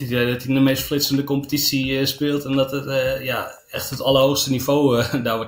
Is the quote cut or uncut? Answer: uncut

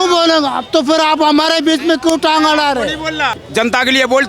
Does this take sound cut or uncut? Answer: cut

